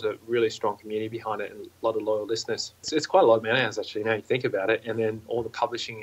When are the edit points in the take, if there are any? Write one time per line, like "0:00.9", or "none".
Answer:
0:02.9